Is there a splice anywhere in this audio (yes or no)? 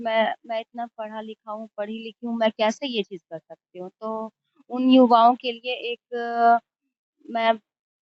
no